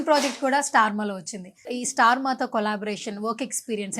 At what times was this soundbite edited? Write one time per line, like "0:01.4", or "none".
0:01.6

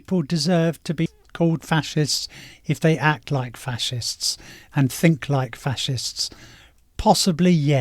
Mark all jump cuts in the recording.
0:01.2

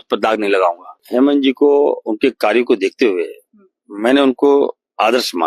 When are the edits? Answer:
0:00.9

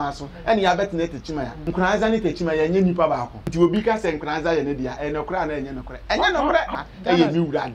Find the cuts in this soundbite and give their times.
0:01.6
0:03.4
0:06.7

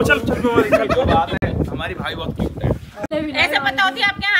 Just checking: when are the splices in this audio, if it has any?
0:03.0

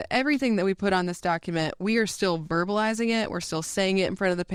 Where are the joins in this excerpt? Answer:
none

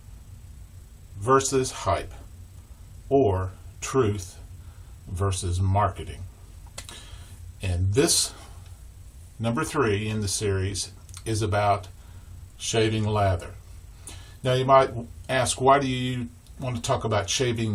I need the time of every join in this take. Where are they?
0:15.4

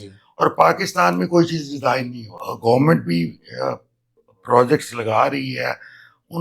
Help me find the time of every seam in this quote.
0:02.4

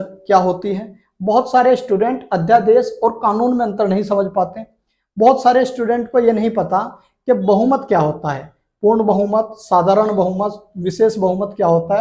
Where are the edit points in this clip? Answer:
none

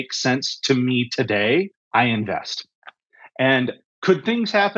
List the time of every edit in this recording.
0:01.8
0:03.9

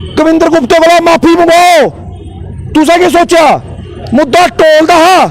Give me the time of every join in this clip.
none

